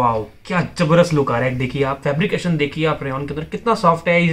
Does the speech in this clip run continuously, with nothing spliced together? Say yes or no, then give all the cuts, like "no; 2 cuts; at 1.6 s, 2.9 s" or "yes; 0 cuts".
yes; 0 cuts